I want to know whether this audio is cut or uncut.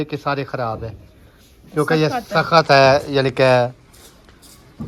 uncut